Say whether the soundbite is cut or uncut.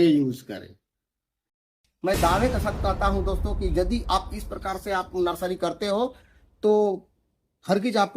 cut